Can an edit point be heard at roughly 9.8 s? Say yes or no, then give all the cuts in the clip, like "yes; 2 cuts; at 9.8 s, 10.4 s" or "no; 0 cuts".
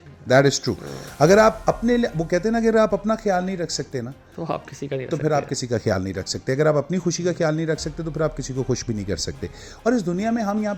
no; 0 cuts